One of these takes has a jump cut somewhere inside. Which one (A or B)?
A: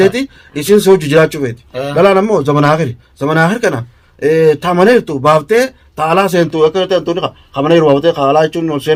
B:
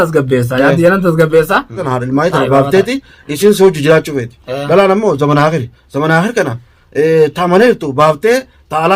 B